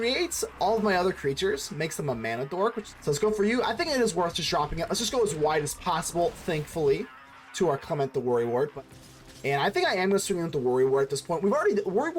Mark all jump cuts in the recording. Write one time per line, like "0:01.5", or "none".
0:02.9
0:08.7